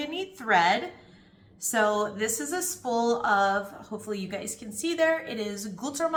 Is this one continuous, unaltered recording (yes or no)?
yes